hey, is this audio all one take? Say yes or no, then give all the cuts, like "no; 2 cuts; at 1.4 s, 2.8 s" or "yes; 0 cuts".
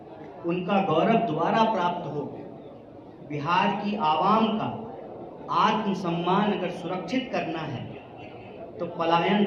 yes; 0 cuts